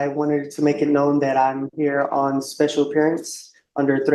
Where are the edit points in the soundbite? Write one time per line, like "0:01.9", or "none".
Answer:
none